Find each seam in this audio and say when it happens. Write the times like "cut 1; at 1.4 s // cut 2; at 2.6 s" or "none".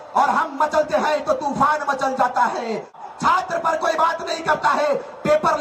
cut 1; at 3.0 s

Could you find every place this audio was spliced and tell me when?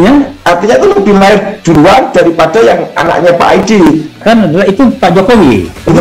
none

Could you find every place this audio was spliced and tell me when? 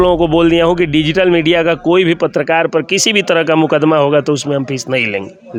none

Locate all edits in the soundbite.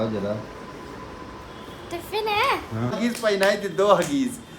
cut 1; at 2.9 s

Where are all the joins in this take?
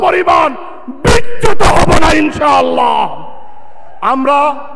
none

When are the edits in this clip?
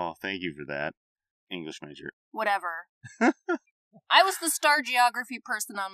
cut 1; at 2.1 s // cut 2; at 3.5 s

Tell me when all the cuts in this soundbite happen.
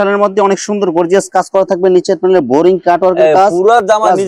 none

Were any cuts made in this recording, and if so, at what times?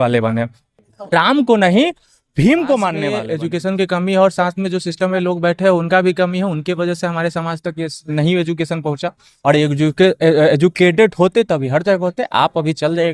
cut 1; at 3.2 s

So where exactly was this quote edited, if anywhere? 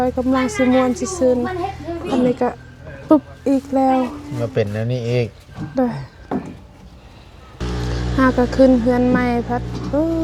cut 1; at 7.6 s

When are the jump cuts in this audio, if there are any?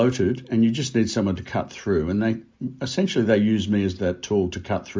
none

